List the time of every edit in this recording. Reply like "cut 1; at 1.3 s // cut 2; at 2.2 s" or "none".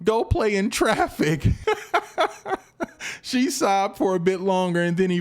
cut 1; at 1.6 s